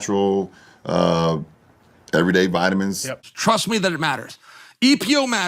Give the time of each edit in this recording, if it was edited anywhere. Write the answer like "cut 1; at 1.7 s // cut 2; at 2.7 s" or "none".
cut 1; at 3.2 s